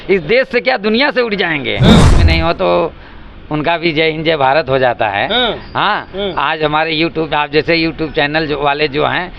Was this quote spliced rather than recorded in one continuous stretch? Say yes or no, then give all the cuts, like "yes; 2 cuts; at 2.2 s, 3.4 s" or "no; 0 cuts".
yes; 1 cut; at 2.2 s